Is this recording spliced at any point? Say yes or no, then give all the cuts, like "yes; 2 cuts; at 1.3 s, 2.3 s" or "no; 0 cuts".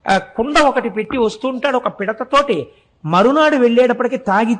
no; 0 cuts